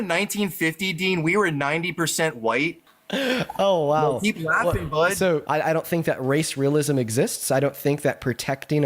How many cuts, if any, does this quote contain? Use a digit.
2